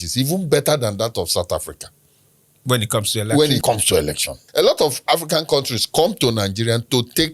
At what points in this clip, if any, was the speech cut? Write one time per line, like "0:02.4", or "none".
0:04.4